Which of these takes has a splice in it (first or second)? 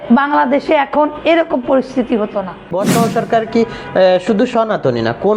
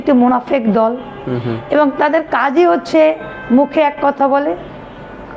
first